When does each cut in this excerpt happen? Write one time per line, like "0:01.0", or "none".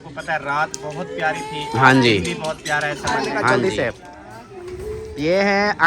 0:03.5